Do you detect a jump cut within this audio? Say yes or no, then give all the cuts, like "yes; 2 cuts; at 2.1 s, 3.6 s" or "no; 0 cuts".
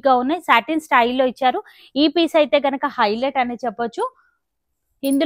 no; 0 cuts